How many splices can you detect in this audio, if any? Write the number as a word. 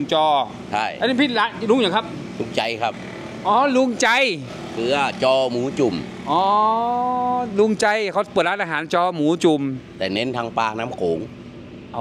zero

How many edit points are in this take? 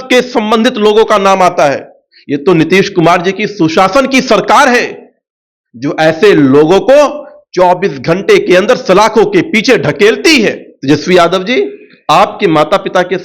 one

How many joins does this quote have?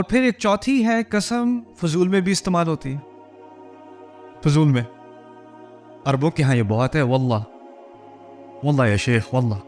two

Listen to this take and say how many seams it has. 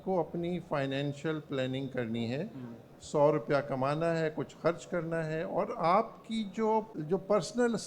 one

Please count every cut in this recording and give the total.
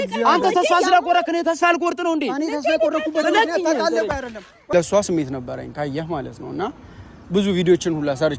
one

